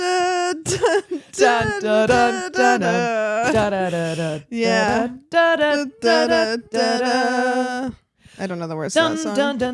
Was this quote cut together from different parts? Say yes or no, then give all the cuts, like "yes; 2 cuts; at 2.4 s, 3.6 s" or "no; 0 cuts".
no; 0 cuts